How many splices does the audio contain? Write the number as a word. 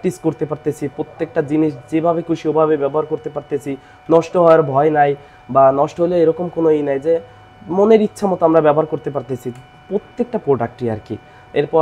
zero